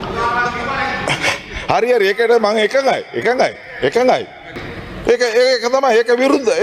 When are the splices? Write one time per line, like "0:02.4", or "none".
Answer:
0:04.5